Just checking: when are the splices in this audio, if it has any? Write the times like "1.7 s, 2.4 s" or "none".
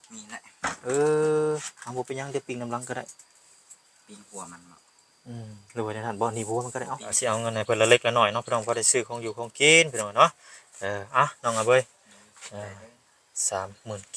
7.1 s

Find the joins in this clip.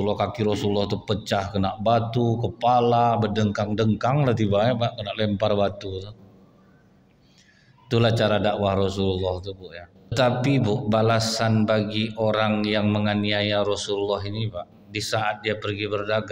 10.1 s

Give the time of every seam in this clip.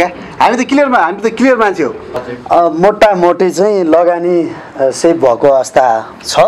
2.1 s

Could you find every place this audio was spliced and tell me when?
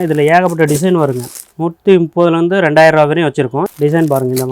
1.5 s, 3.7 s

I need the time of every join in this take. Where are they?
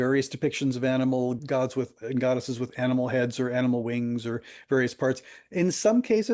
1.4 s

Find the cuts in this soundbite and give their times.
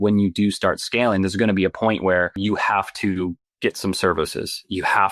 2.4 s, 3.5 s

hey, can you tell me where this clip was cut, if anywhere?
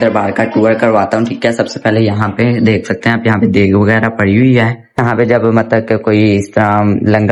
none

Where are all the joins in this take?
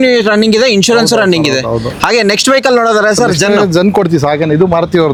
none

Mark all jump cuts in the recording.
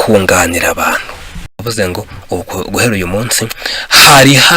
1.6 s

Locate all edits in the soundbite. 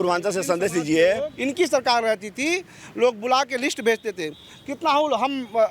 1.3 s

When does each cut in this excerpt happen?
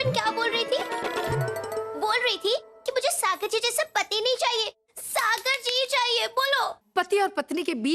6.8 s

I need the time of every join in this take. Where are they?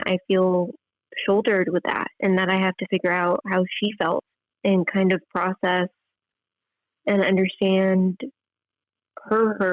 4.4 s

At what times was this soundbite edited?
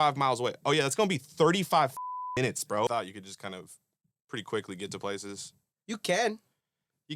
2.9 s

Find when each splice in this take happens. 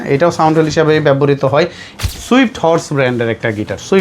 1.9 s

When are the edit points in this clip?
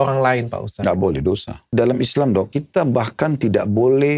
1.6 s, 2.6 s

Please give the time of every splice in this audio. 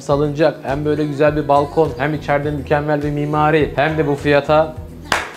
3.7 s

